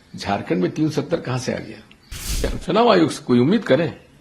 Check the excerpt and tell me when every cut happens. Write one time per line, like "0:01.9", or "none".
0:02.3